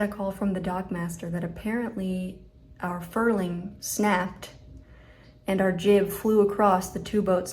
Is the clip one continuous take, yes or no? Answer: no